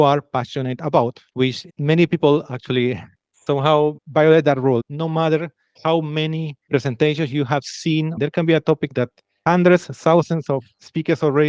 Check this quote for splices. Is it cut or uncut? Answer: cut